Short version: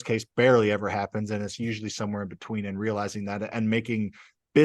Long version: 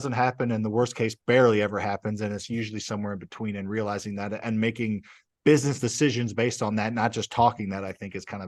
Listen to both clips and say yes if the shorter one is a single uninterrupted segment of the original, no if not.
yes